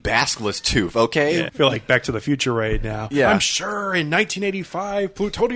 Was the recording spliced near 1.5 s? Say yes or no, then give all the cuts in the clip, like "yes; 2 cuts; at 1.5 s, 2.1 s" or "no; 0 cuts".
yes; 1 cut; at 1.5 s